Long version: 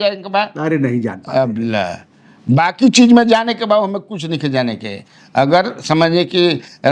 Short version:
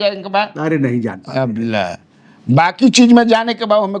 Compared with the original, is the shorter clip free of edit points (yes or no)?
yes